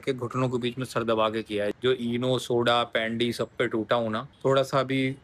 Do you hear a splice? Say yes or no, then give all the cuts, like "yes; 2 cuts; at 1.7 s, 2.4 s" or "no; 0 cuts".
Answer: yes; 2 cuts; at 1.7 s, 4.3 s